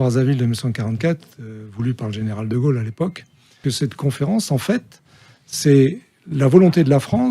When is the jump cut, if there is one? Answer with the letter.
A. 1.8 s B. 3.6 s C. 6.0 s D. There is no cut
B